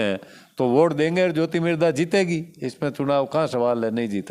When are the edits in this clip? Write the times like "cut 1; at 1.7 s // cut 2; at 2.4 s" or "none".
none

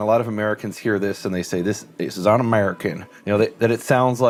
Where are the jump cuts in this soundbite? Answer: none

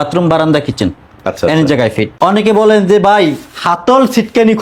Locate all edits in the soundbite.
cut 1; at 2.1 s

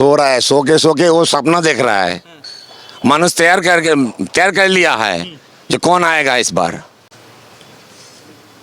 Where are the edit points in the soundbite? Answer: none

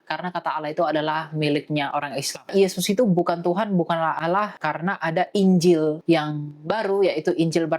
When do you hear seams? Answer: cut 1; at 2.5 s // cut 2; at 4.6 s // cut 3; at 6.0 s

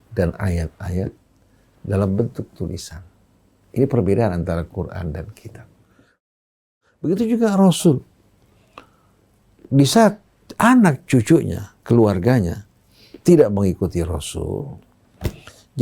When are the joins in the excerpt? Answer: cut 1; at 6.3 s

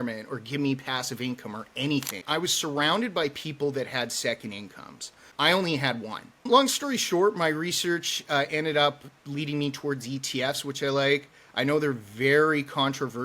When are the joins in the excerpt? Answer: cut 1; at 2.2 s // cut 2; at 5.3 s // cut 3; at 6.4 s

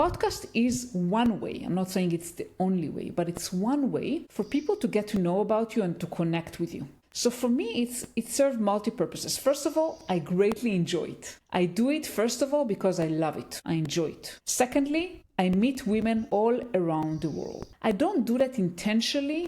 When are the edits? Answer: cut 1; at 17.6 s

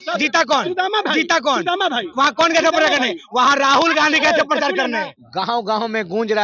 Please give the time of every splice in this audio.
cut 1; at 5.2 s

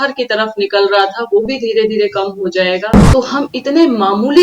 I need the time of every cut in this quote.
cut 1; at 3.0 s

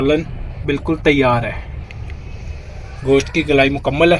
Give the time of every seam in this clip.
cut 1; at 1.8 s

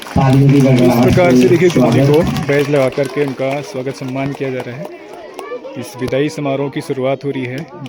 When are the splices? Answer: none

